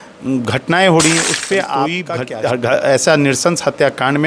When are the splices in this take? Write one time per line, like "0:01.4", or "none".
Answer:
0:02.1